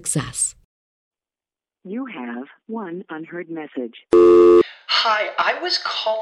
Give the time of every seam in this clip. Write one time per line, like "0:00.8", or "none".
0:01.1